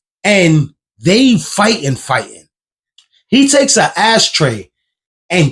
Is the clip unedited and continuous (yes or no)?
yes